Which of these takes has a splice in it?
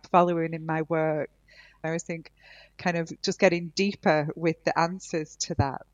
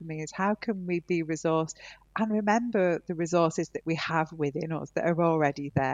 first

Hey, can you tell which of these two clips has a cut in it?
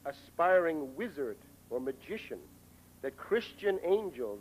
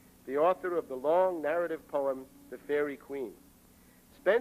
second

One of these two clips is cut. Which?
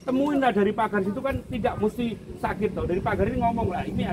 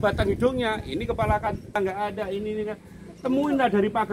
second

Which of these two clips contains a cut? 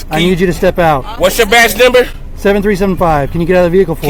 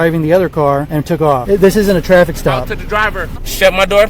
second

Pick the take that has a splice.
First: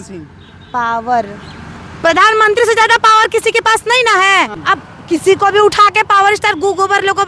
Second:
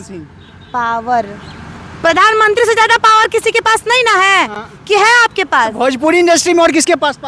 first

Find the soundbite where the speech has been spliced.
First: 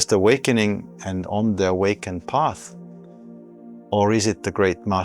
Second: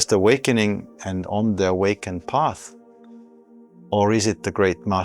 first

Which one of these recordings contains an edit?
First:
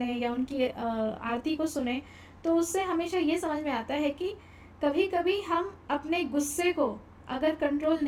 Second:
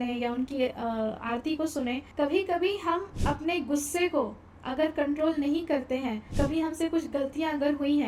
second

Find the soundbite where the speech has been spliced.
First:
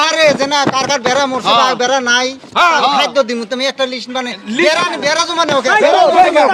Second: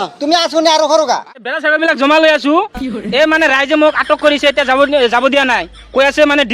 second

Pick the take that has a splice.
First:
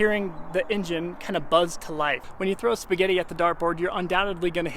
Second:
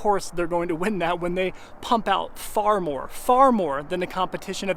first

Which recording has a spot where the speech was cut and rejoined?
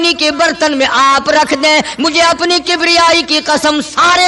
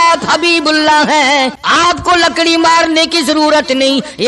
second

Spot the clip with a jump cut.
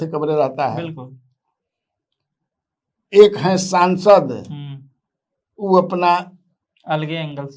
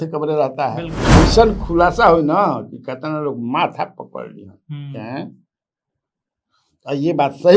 second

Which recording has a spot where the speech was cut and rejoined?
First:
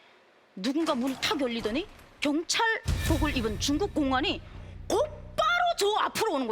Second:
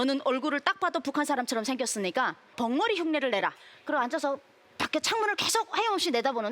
second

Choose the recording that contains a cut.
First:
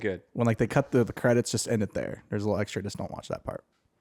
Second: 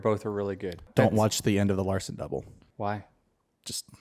second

